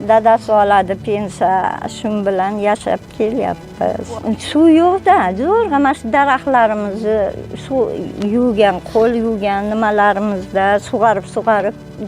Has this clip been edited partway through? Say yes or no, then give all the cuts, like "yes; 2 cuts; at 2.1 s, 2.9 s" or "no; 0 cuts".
yes; 1 cut; at 4.1 s